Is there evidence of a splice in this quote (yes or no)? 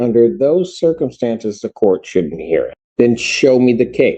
yes